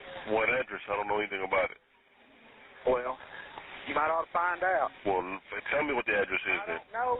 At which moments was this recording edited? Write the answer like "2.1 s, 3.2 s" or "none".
none